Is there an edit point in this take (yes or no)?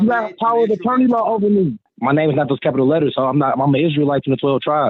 yes